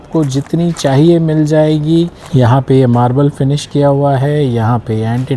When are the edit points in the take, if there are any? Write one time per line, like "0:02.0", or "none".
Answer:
0:02.2